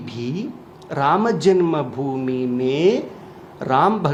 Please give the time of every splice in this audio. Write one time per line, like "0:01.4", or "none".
none